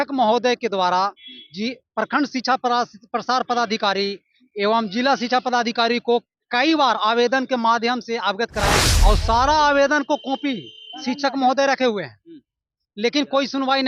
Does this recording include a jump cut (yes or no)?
yes